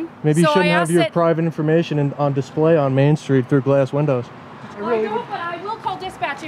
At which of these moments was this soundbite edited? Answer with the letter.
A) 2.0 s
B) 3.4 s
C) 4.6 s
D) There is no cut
C